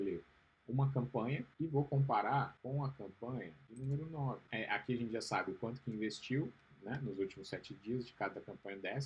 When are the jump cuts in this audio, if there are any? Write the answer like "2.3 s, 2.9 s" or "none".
1.5 s, 2.6 s, 3.6 s, 4.4 s